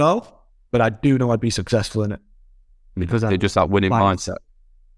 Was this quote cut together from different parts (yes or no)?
no